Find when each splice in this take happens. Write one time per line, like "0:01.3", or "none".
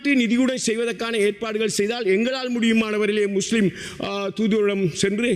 none